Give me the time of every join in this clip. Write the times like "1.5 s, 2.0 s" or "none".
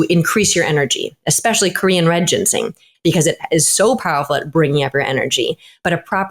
2.9 s